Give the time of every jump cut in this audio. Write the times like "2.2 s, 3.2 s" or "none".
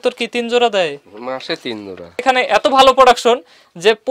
2.2 s